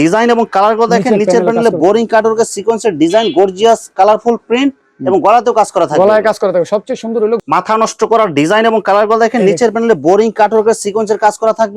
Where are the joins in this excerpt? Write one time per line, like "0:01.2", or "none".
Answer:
0:07.4